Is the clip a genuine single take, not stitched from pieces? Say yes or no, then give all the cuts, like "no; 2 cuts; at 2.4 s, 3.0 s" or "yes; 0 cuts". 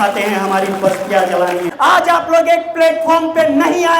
no; 1 cut; at 1.7 s